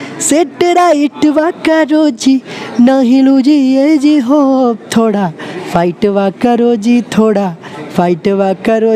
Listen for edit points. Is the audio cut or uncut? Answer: uncut